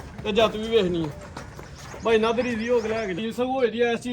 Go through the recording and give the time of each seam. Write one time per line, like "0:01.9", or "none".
0:03.2